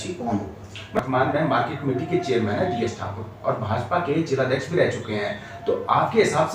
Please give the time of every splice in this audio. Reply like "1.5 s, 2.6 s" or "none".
0.9 s

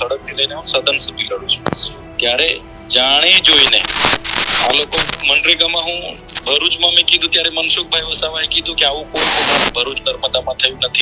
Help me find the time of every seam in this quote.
none

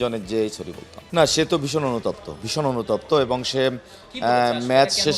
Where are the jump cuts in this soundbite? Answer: 1.0 s

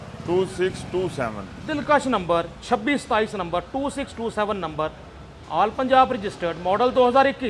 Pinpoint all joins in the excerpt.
none

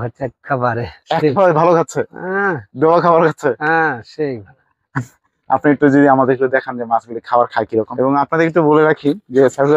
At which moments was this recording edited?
none

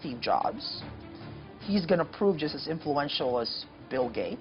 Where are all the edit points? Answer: none

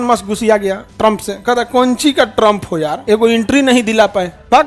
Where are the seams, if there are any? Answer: 3.0 s

